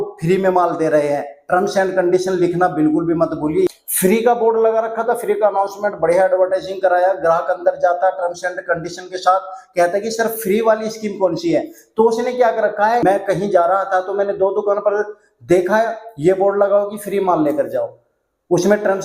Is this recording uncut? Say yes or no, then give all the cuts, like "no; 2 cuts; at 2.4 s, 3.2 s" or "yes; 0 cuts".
no; 2 cuts; at 3.7 s, 13.0 s